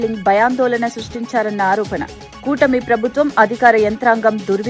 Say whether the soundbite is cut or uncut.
uncut